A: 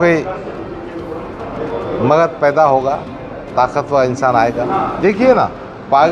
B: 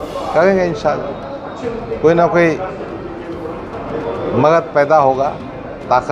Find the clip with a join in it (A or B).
A